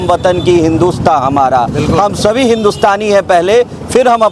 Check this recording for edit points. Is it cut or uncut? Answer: uncut